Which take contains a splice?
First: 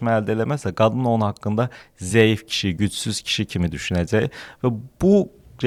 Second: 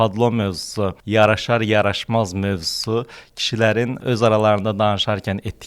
second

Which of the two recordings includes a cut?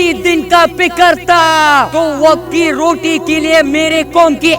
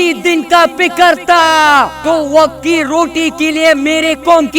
first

